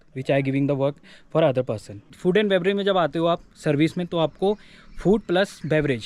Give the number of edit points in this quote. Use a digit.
1